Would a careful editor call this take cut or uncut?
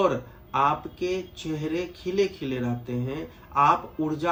uncut